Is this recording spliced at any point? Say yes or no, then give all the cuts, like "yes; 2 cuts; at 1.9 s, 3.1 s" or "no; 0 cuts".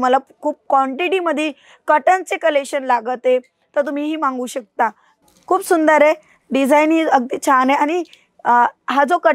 yes; 1 cut; at 5.1 s